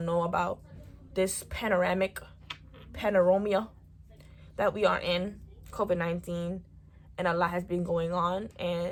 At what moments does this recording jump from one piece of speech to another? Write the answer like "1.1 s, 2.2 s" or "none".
none